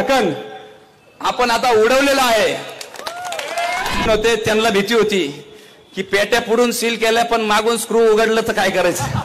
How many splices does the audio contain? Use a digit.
1